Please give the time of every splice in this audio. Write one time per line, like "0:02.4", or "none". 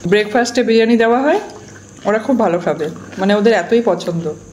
none